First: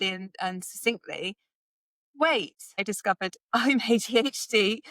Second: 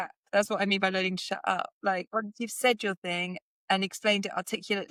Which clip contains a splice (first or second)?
first